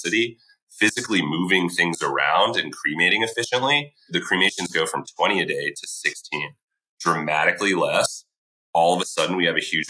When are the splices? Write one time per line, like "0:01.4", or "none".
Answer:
0:04.1